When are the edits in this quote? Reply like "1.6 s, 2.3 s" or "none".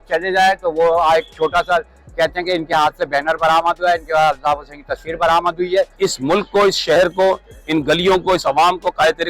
5.9 s